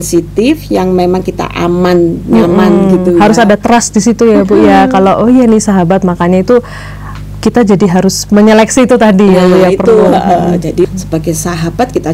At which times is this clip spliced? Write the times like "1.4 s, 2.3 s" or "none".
10.8 s